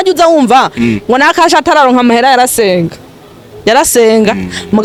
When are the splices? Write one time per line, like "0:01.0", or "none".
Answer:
none